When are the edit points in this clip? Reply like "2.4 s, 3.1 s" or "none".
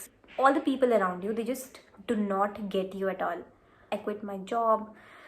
3.9 s